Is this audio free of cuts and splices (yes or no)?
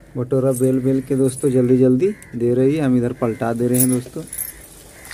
yes